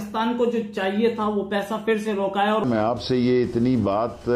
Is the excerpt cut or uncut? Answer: cut